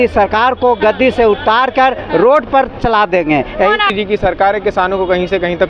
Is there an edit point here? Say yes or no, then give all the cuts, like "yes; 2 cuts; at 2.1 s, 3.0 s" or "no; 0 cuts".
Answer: yes; 1 cut; at 3.9 s